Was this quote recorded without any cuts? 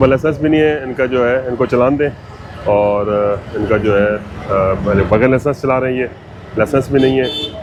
yes; 0 cuts

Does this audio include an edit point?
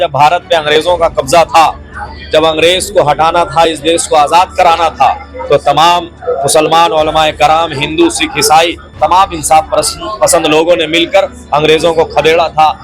no; 0 cuts

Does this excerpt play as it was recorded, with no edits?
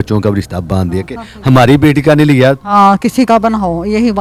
yes; 0 cuts

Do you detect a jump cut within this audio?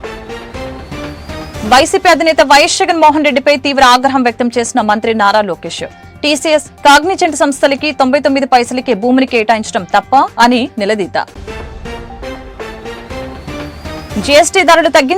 yes; 1 cut; at 0.9 s

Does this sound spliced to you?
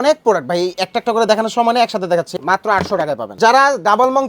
yes; 2 cuts; at 2.3 s, 3.3 s

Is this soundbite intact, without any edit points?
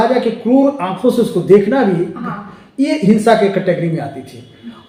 yes; 0 cuts

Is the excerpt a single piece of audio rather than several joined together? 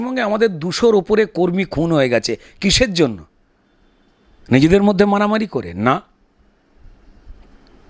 yes; 0 cuts

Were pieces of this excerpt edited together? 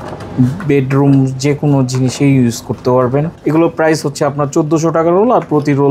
yes; 1 cut; at 3.3 s

